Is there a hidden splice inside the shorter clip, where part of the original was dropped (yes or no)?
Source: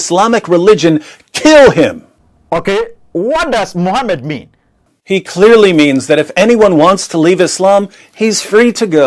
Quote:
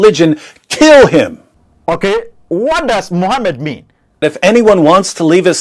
yes